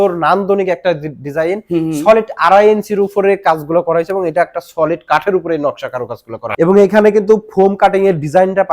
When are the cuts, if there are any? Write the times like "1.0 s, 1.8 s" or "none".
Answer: none